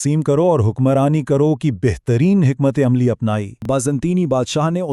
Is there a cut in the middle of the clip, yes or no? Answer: yes